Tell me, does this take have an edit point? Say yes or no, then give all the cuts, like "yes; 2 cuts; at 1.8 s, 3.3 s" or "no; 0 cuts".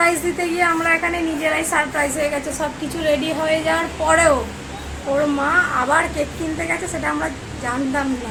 no; 0 cuts